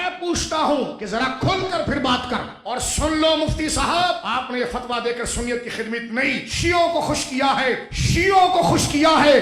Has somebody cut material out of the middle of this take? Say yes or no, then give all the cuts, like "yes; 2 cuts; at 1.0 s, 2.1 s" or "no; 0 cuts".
yes; 5 cuts; at 1.0 s, 2.6 s, 4.2 s, 6.5 s, 7.9 s